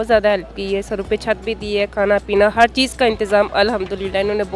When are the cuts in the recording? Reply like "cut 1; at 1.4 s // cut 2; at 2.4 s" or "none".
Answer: none